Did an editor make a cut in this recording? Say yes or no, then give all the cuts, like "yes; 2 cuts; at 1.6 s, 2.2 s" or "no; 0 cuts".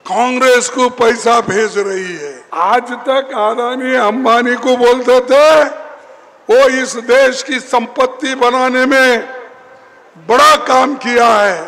yes; 1 cut; at 2.4 s